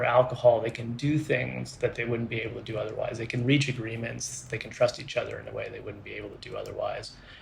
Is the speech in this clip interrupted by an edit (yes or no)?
no